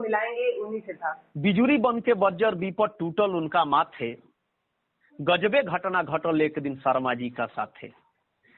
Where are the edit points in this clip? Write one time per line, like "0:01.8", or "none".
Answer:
0:01.3